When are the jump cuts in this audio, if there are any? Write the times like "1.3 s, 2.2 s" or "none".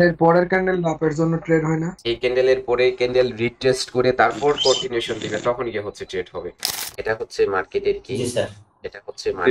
2.0 s, 6.8 s